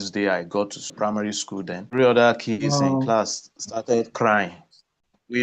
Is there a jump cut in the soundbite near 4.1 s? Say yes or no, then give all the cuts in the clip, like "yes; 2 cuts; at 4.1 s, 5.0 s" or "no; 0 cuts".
no; 2 cuts; at 0.9 s, 1.8 s